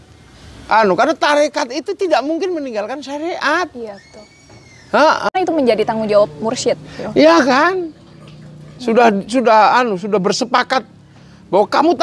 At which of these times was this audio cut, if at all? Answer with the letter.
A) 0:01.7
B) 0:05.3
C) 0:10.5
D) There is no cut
B